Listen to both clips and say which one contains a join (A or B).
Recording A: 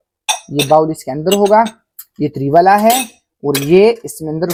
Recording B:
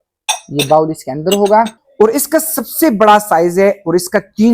B